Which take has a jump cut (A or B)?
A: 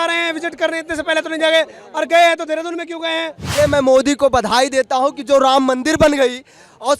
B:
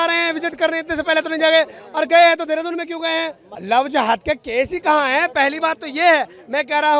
A